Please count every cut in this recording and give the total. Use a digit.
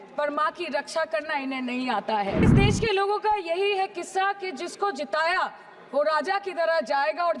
1